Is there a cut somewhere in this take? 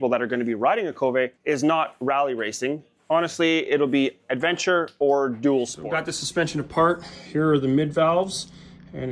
yes; 3 cuts; at 1.4 s, 2.9 s, 5.8 s

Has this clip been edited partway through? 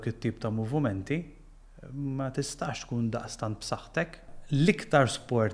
yes; 1 cut; at 4.3 s

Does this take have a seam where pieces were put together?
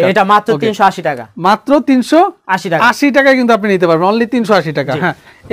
no; 0 cuts

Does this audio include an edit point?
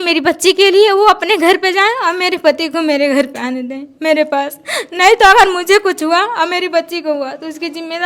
no; 0 cuts

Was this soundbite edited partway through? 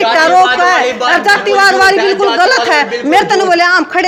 no; 0 cuts

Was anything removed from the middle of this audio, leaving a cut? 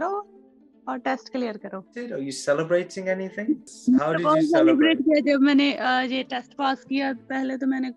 yes; 2 cuts; at 2.0 s, 3.7 s

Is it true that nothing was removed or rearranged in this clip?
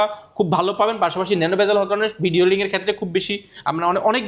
yes; 0 cuts

